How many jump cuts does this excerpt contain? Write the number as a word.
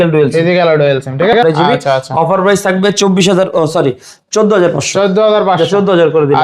one